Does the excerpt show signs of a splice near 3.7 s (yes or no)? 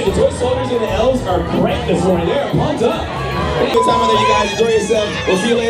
yes